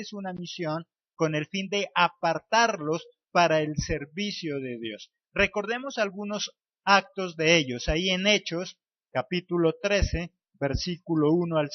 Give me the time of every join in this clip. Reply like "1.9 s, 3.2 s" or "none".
10.4 s